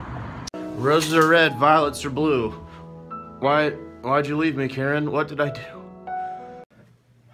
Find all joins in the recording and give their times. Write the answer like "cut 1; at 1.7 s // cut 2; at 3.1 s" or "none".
cut 1; at 4.0 s